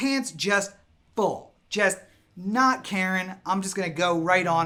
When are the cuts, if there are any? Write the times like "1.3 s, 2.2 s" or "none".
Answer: none